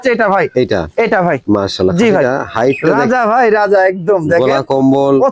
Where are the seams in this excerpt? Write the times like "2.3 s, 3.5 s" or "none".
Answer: 2.9 s